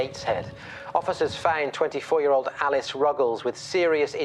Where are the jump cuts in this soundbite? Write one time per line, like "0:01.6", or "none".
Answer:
none

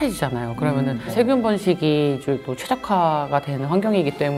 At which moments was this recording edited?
none

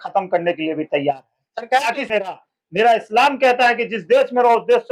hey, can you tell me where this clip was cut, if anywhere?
0:02.4

